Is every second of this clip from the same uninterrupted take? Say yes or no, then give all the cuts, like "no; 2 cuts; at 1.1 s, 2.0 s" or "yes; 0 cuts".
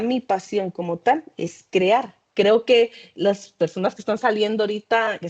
no; 1 cut; at 2.2 s